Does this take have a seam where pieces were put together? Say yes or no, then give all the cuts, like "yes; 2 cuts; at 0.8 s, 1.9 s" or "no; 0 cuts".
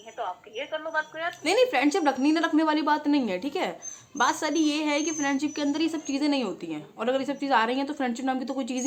no; 0 cuts